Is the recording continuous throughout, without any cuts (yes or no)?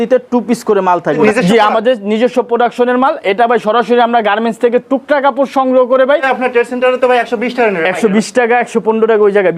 no